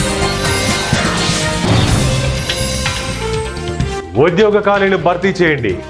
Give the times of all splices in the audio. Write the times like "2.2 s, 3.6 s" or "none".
4.0 s